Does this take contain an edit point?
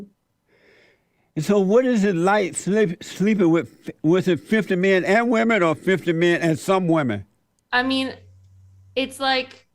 no; 0 cuts

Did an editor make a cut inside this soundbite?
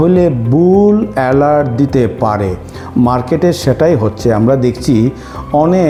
no; 0 cuts

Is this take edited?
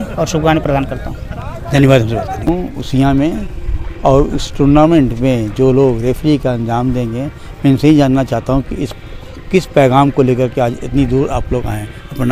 no; 0 cuts

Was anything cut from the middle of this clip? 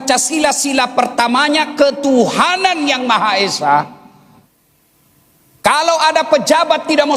yes; 1 cut; at 4.4 s

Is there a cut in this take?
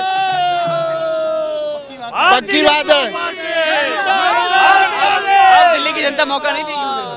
no; 0 cuts

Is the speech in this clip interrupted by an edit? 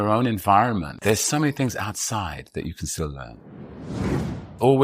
yes; 2 cuts; at 1.0 s, 3.9 s

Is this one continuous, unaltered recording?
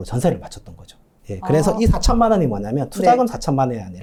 yes; 0 cuts

